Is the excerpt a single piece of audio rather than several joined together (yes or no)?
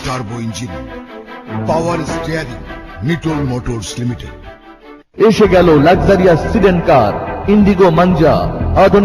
no